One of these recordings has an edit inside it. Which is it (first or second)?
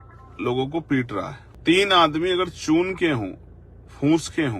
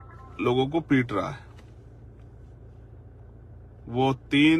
first